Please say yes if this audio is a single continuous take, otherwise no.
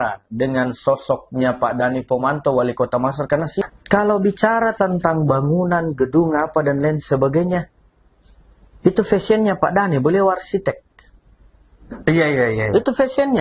no